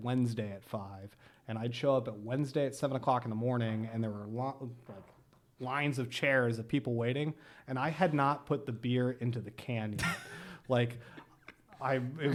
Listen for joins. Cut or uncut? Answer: uncut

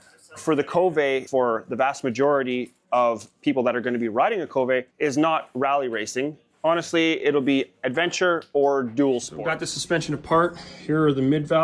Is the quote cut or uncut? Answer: cut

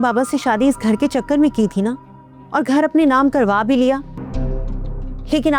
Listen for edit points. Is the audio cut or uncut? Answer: cut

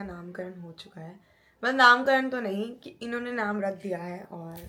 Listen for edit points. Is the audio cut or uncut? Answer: uncut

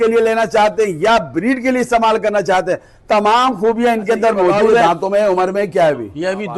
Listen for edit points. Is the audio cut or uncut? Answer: cut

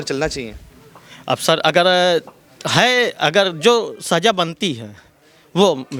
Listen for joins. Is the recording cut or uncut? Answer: uncut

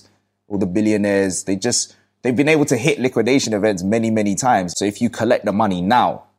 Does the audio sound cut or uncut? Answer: cut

